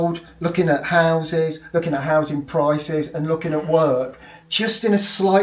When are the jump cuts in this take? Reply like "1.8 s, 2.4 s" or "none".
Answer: none